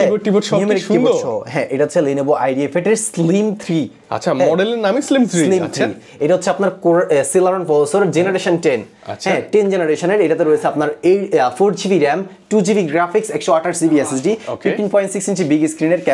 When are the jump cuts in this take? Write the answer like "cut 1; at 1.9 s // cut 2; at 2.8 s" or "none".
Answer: none